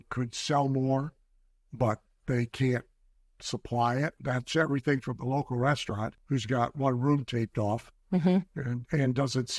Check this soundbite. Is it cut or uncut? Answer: cut